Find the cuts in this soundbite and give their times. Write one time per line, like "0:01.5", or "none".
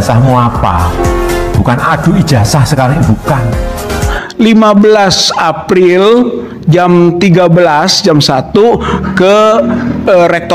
0:04.2